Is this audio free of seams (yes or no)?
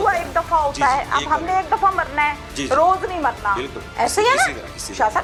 yes